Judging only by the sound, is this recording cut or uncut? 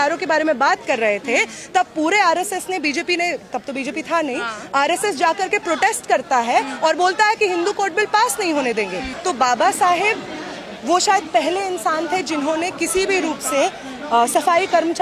cut